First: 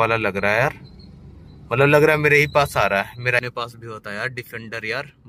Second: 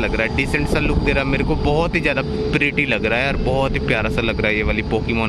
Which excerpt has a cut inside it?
first; 1 cut; at 3.4 s

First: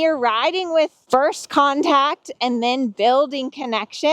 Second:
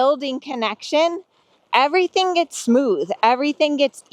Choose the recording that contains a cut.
first; 1 cut; at 1.0 s

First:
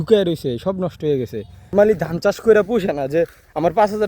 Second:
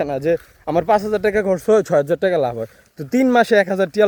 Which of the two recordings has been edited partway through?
first; 1 cut; at 1.7 s

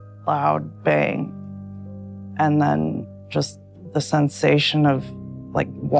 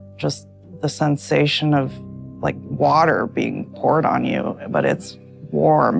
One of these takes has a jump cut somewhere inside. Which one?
first; 1 cut; at 1.9 s

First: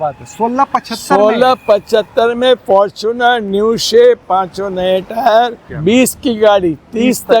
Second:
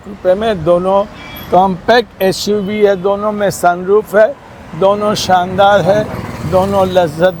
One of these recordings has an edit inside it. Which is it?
first; 1 cut; at 5.7 s

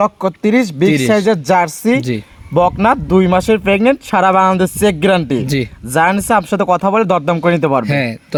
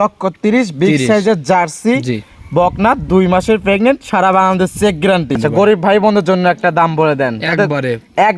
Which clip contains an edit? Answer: second; 1 cut; at 5.3 s

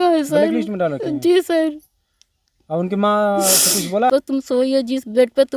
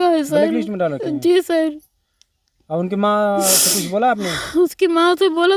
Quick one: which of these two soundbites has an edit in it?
first; 1 cut; at 4.1 s

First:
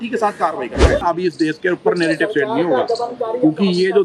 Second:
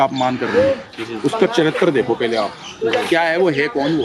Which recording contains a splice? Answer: first; 1 cut; at 1.0 s

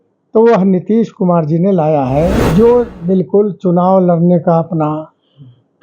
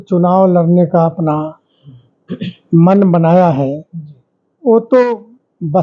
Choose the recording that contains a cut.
first; 1 cut; at 2.4 s

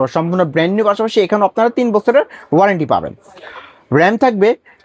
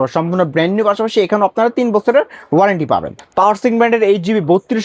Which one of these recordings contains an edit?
second; 1 cut; at 3.2 s

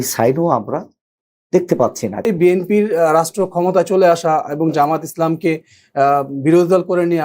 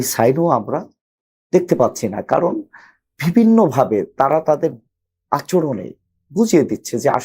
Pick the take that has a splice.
first; 1 cut; at 2.3 s

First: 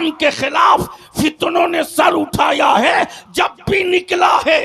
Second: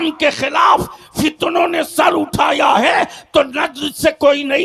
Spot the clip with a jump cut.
first; 1 cut; at 3.2 s

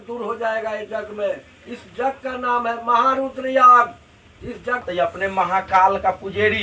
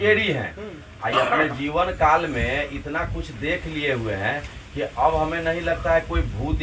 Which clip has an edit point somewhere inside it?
first; 1 cut; at 4.8 s

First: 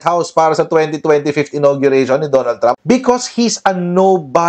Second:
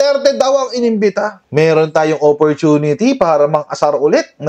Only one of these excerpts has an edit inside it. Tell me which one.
second; 1 cut; at 1.4 s

